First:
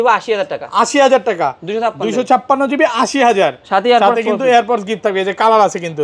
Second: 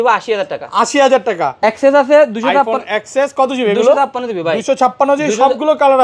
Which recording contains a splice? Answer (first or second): second